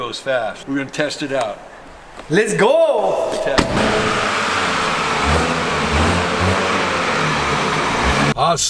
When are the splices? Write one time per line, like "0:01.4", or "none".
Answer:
none